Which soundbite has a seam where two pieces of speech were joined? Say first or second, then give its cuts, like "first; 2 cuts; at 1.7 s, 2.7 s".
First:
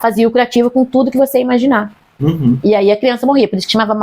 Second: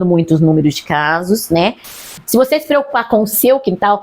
second; 1 cut; at 2.1 s